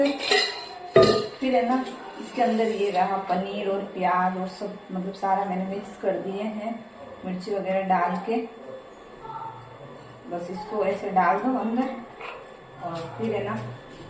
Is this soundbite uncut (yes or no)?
yes